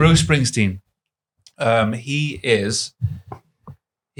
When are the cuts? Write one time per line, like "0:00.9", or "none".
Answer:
none